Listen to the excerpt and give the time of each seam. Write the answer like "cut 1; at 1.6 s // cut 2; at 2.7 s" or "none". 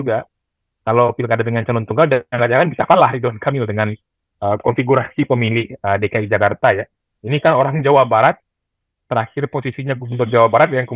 none